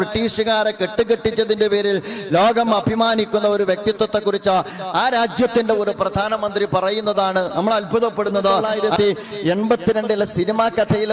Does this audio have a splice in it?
yes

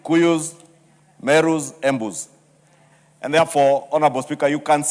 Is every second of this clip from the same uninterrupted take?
yes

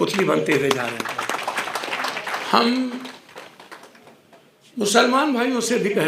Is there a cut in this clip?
no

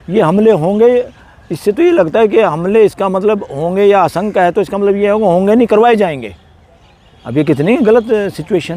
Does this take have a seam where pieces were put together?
no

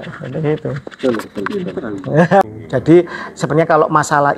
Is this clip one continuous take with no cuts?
no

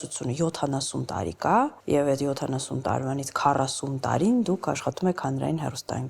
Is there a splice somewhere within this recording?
yes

